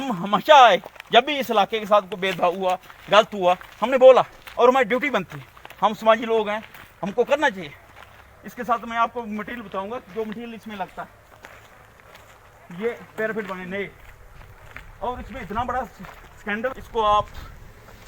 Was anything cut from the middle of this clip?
yes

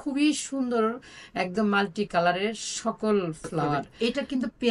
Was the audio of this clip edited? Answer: yes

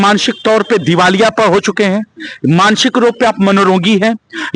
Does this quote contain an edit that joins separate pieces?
no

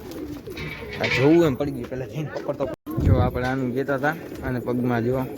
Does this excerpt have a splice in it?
yes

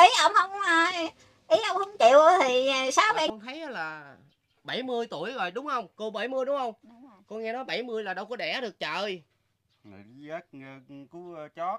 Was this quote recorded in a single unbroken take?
no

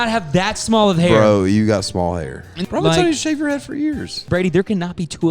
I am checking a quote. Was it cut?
yes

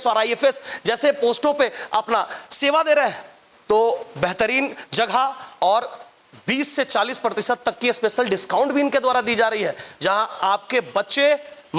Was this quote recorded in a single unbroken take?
yes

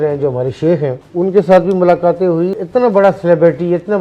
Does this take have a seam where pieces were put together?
yes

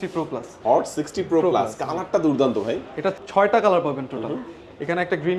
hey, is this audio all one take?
no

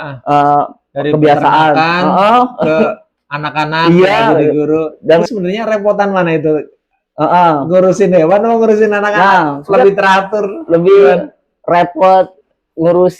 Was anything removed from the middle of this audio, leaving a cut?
yes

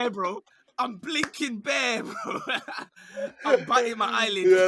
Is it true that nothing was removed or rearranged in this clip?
yes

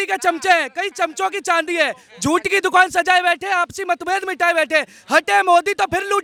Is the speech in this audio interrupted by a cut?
no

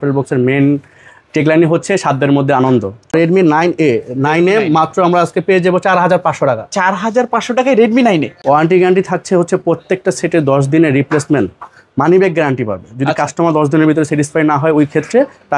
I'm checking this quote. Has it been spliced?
yes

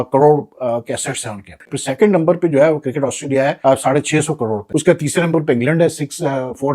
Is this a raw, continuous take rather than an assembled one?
no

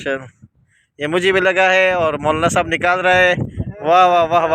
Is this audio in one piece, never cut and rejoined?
yes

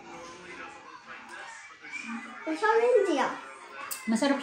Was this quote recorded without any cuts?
yes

